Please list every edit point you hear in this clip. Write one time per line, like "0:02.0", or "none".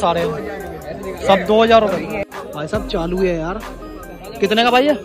0:02.2